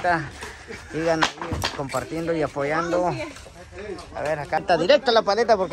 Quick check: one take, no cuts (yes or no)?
no